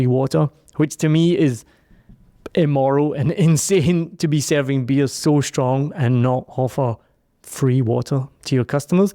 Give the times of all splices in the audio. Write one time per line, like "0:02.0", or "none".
none